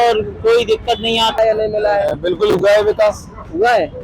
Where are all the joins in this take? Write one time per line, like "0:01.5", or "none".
0:01.4